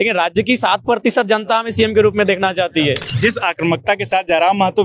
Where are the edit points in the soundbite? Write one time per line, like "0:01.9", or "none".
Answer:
0:03.1